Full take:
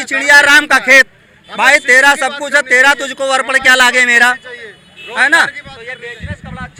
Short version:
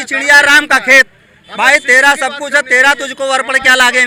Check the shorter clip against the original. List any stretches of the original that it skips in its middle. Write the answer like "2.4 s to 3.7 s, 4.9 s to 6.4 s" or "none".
none